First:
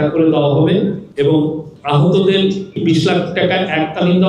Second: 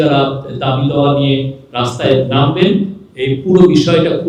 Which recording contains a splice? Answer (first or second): first